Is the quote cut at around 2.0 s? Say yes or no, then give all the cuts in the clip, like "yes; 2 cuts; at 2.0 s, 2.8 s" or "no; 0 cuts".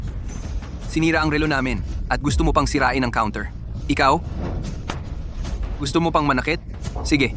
no; 0 cuts